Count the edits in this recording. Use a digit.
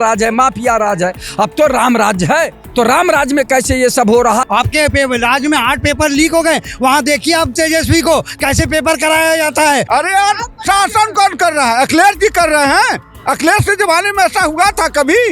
2